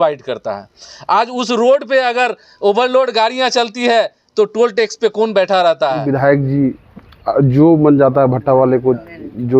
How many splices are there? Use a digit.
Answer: 1